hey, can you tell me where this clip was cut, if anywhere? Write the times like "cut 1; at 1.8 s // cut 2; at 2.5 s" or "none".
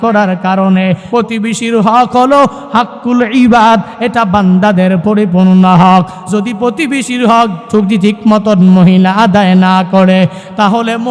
cut 1; at 1.0 s

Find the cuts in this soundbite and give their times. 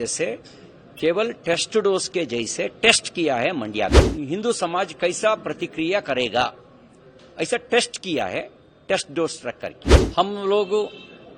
cut 1; at 4.0 s // cut 2; at 9.9 s

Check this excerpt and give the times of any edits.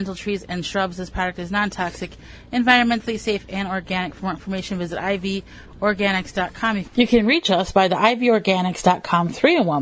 cut 1; at 6.8 s

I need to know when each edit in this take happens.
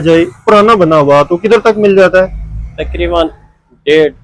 none

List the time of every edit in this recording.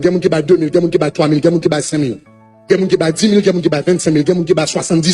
none

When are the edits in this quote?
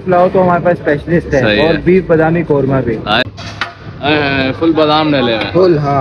cut 1; at 3.2 s

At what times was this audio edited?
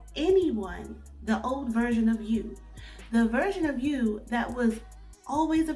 none

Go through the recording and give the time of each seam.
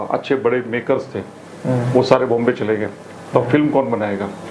none

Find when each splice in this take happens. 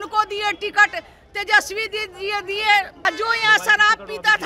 cut 1; at 2.9 s

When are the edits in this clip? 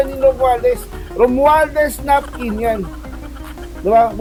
none

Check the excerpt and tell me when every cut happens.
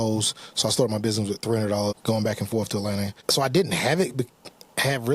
cut 1; at 2.0 s // cut 2; at 3.1 s

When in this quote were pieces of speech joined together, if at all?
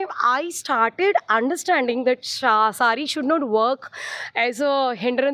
none

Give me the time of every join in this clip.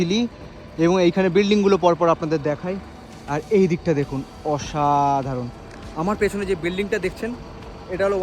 none

